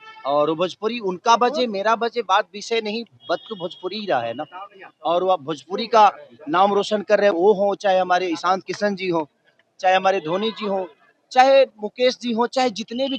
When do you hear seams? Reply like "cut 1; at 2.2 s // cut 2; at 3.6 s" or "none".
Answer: none